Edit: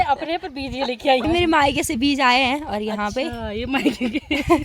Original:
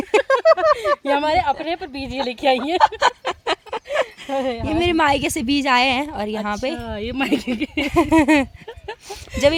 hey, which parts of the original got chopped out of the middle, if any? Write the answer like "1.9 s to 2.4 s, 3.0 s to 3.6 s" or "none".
2.6 s to 4.7 s